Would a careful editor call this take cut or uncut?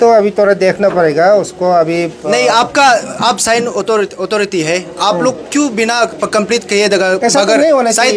uncut